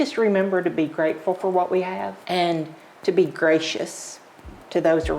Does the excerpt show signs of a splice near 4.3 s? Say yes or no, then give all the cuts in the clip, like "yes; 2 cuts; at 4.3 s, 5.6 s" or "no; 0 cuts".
no; 1 cut; at 2.2 s